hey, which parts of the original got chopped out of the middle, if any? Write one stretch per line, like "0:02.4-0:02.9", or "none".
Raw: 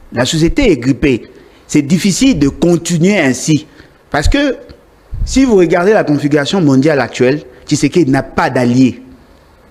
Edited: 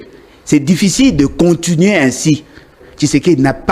0:04.0-0:07.5